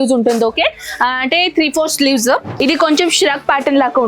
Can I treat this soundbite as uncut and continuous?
no; 1 cut; at 2.6 s

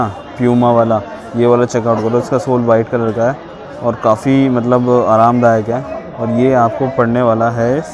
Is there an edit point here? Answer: no; 0 cuts

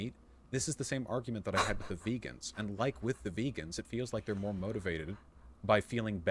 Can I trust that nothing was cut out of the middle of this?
no; 1 cut; at 3.0 s

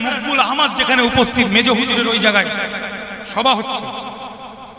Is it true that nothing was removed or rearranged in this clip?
yes; 0 cuts

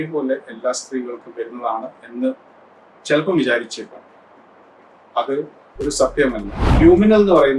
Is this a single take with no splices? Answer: no; 1 cut; at 6.6 s

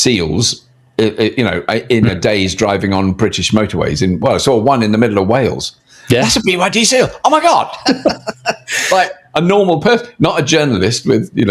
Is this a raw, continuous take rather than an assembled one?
yes; 0 cuts

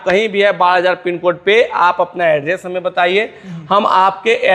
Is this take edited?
no; 0 cuts

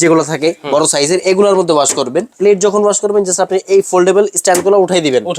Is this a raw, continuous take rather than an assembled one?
no; 1 cut; at 2.3 s

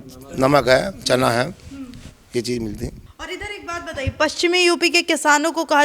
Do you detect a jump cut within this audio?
yes; 1 cut; at 3.0 s

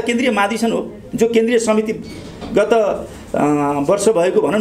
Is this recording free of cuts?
yes; 0 cuts

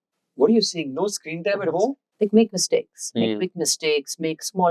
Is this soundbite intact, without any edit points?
no; 1 cut; at 2.0 s

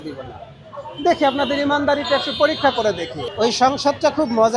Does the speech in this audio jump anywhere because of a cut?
yes; 1 cut; at 3.2 s

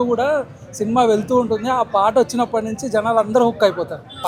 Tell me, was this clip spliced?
no; 0 cuts

